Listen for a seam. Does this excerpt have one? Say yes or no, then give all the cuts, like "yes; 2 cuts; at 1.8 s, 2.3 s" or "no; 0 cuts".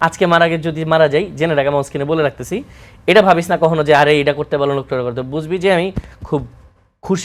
no; 0 cuts